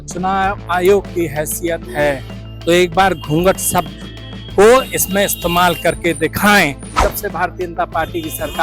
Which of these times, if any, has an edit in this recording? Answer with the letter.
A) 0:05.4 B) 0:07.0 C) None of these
B